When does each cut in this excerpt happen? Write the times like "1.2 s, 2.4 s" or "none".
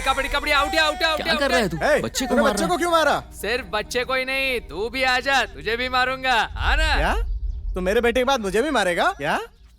none